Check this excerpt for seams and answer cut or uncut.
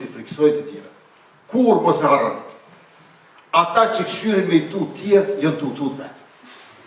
uncut